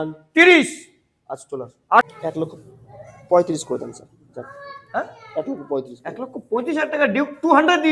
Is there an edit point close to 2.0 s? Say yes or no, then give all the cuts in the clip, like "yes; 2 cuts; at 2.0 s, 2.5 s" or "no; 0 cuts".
yes; 1 cut; at 2.0 s